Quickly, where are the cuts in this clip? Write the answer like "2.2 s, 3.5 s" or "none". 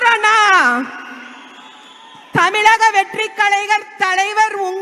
none